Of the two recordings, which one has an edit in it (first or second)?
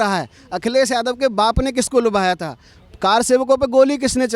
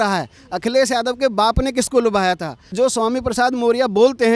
second